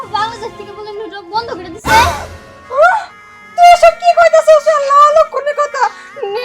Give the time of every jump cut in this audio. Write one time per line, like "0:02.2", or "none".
none